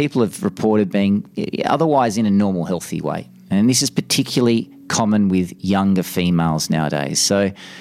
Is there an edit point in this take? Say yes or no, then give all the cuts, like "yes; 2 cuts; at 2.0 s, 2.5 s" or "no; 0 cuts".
no; 0 cuts